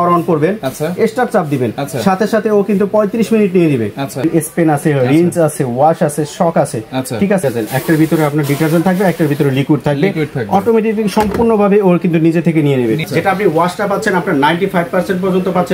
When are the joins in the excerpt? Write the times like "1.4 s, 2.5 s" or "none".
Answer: 4.2 s, 7.4 s, 13.0 s